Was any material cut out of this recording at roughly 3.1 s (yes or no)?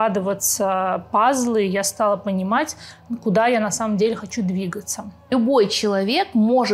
no